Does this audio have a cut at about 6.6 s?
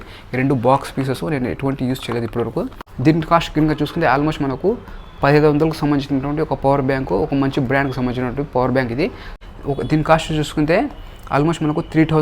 no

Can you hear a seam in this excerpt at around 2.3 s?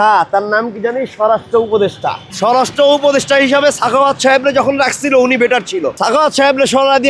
no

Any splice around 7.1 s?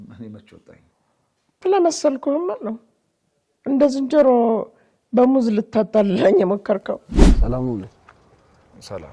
yes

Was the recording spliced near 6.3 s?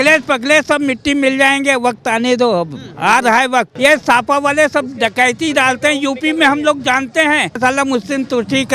no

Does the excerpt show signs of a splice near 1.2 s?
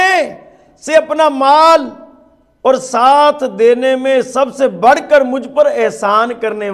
no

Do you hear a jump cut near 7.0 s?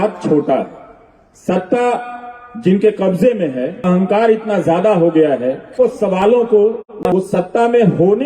no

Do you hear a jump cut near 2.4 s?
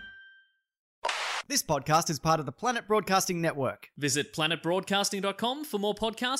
no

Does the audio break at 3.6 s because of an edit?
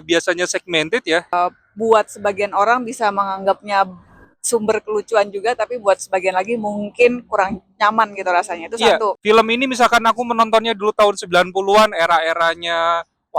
no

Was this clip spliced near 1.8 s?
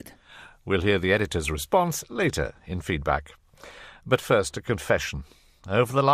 yes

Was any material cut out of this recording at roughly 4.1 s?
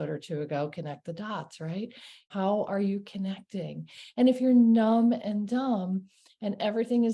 no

